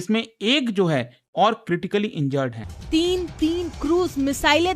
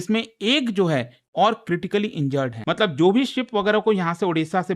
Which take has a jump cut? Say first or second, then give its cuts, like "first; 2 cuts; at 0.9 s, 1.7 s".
first; 1 cut; at 2.6 s